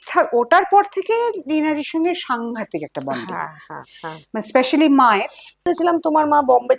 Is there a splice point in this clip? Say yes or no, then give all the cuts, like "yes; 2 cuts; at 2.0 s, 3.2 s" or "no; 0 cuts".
yes; 1 cut; at 5.6 s